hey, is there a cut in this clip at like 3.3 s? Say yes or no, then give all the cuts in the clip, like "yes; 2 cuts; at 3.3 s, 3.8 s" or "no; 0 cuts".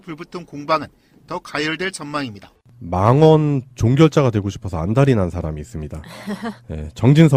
no; 1 cut; at 5.9 s